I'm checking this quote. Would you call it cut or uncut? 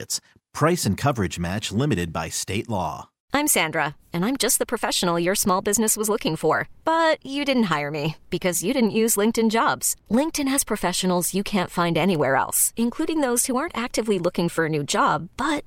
cut